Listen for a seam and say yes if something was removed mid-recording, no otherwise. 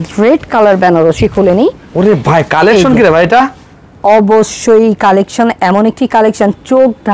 no